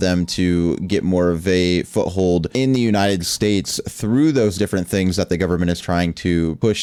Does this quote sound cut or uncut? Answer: uncut